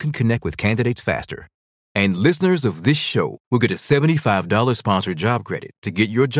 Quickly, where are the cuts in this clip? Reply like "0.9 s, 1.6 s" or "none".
none